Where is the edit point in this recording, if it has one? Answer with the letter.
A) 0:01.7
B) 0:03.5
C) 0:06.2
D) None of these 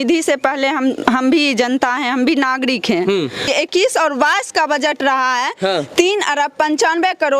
B